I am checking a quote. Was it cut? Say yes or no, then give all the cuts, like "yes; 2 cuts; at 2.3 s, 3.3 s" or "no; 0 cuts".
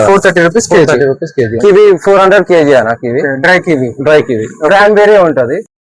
yes; 1 cut; at 1.5 s